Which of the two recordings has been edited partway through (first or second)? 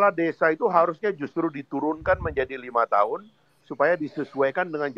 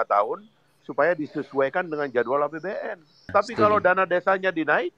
second